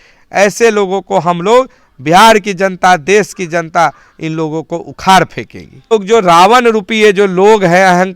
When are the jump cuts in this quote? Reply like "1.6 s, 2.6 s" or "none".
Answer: 5.9 s